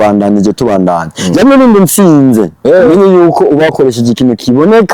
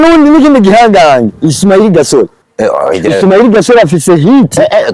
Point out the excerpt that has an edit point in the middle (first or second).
second